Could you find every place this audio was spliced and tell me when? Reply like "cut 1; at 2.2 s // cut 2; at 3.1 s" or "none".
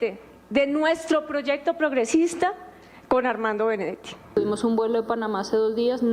cut 1; at 4.1 s